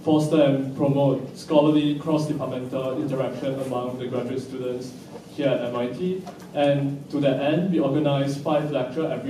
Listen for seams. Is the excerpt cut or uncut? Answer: cut